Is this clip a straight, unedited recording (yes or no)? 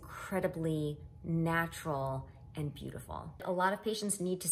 no